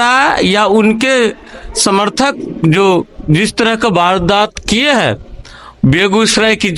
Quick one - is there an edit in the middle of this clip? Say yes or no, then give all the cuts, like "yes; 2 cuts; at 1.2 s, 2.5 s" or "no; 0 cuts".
no; 0 cuts